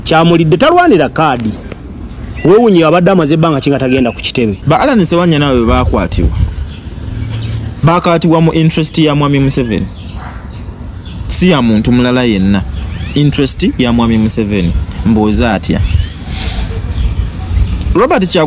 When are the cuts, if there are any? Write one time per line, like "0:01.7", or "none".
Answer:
0:04.6